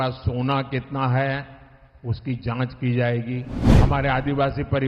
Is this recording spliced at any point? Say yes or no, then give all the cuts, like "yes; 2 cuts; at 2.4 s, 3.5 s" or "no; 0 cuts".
yes; 1 cut; at 3.6 s